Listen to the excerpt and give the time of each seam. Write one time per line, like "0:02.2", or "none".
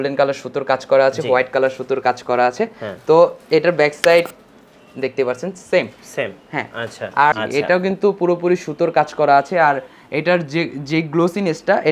0:07.3